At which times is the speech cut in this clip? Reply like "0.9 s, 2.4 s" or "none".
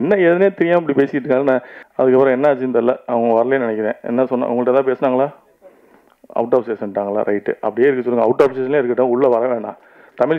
1.8 s